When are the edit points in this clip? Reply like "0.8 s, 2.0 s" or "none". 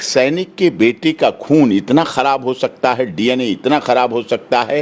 none